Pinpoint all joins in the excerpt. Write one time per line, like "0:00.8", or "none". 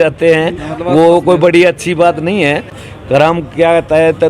0:02.8